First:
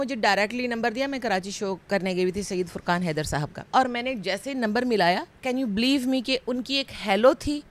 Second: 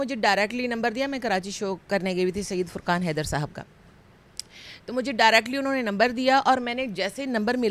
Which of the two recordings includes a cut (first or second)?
first